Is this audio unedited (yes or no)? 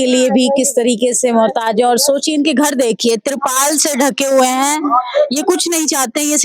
yes